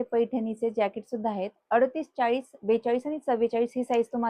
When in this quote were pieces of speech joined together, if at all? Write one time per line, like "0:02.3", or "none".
none